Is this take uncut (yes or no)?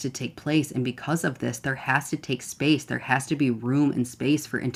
yes